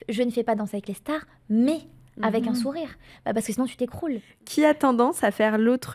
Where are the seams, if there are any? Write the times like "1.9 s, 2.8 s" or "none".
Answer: 4.4 s